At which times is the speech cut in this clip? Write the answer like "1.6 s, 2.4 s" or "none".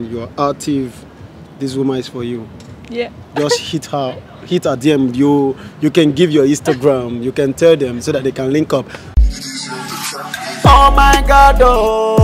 9.0 s